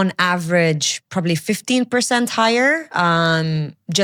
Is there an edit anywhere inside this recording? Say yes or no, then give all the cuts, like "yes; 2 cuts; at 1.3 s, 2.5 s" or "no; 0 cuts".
no; 0 cuts